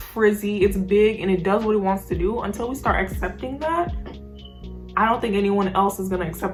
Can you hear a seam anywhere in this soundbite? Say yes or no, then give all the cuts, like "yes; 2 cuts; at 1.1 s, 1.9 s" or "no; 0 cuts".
no; 0 cuts